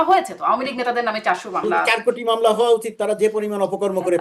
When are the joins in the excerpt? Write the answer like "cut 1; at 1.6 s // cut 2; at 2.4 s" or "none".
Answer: cut 1; at 1.9 s